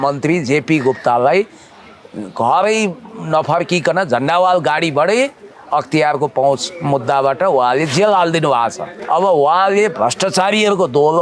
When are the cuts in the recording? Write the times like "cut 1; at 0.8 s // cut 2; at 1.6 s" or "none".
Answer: cut 1; at 8.9 s